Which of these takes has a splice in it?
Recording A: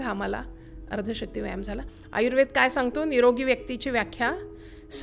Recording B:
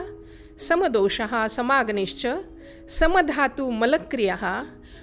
A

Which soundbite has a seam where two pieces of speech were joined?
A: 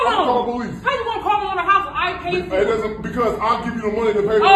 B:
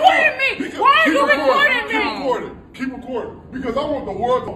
B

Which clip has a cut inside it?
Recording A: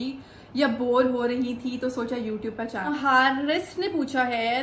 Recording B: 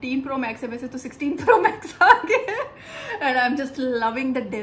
A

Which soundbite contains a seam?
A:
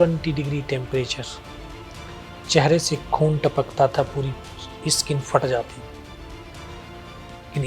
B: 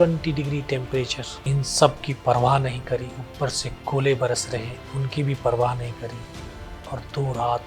B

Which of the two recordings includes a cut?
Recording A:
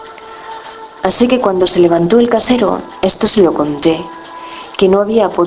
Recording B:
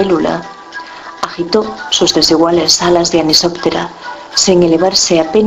A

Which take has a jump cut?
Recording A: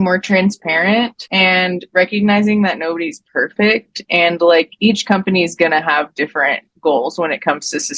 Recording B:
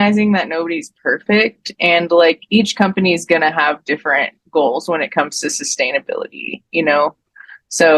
A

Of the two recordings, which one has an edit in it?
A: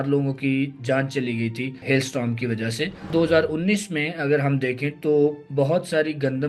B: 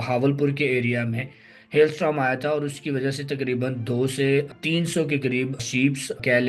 A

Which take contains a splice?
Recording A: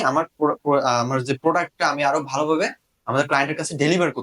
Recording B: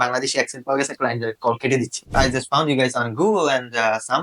B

